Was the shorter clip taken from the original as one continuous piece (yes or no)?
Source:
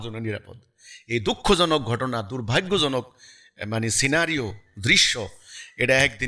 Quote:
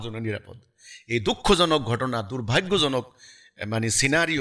yes